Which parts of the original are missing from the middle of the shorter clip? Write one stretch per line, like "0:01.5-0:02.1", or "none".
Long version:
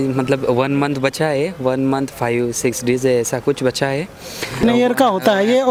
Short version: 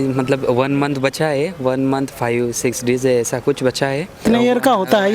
0:04.1-0:04.5